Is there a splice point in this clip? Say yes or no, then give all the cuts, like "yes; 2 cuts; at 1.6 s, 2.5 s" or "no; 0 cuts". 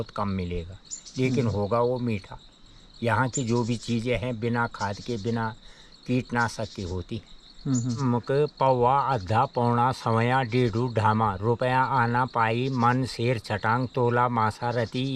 yes; 1 cut; at 8.0 s